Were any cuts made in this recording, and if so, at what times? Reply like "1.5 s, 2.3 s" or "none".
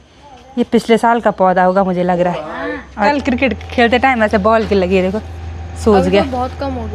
3.1 s